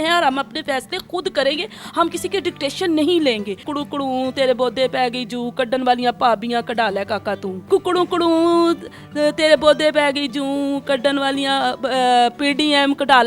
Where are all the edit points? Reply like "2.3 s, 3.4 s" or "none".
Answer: 3.6 s, 7.6 s

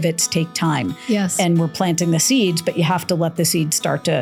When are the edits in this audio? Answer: none

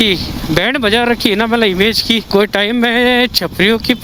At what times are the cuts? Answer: none

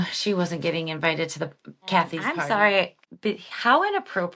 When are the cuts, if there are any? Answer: 2.2 s, 3.0 s

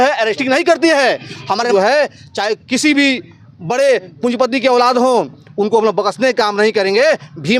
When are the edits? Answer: 1.7 s

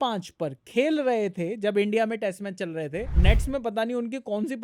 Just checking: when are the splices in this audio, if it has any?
3.1 s

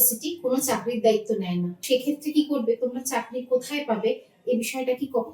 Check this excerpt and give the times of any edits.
1.8 s

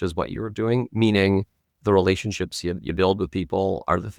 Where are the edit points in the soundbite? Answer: 1.6 s

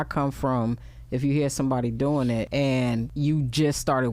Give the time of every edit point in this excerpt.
2.9 s

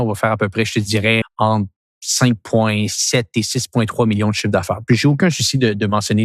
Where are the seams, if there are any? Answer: none

